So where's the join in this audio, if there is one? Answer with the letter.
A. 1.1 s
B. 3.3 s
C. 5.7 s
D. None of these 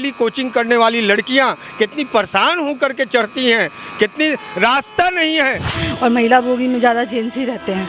C